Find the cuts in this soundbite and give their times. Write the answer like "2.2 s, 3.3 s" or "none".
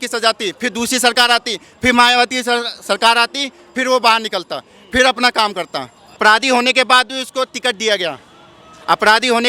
6.2 s